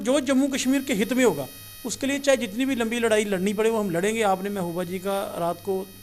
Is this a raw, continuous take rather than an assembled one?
yes; 0 cuts

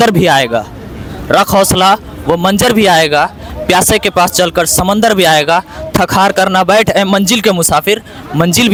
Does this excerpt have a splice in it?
no; 0 cuts

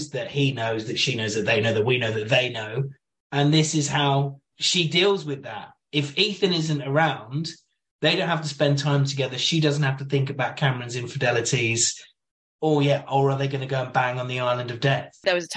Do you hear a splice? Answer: no; 0 cuts

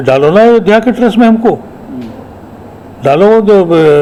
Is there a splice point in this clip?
no; 0 cuts

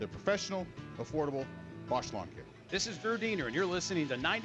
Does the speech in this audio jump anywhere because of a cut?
yes; 1 cut; at 2.6 s

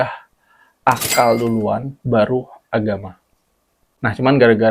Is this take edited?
no; 0 cuts

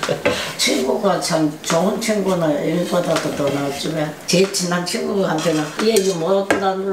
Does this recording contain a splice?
yes; 1 cut; at 4.2 s

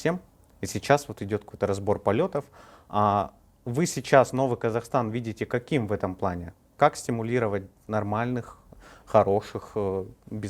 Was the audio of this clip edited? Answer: no; 0 cuts

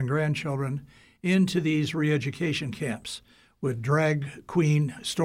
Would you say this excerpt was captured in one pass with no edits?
yes; 0 cuts

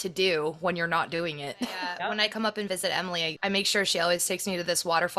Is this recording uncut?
no; 2 cuts; at 1.9 s, 3.3 s

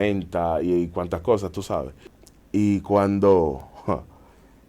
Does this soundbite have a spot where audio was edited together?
yes; 1 cut; at 2.0 s

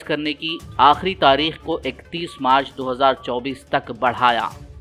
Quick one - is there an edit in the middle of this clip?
no; 0 cuts

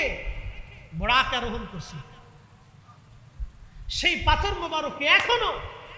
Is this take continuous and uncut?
yes; 0 cuts

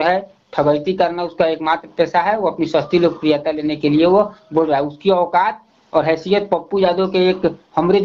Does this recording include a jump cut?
no; 0 cuts

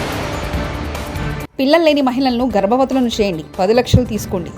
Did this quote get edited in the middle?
yes; 1 cut; at 1.5 s

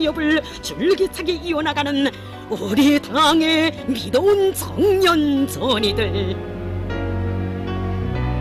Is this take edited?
yes; 1 cut; at 7.5 s

